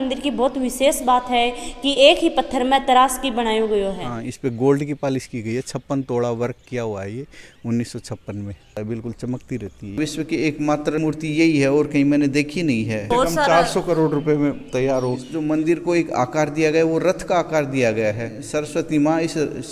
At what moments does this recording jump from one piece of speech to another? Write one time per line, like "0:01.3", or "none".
0:04.2
0:08.8
0:10.0
0:11.0
0:13.0
0:15.3
0:18.4